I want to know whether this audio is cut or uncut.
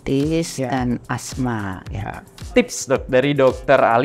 cut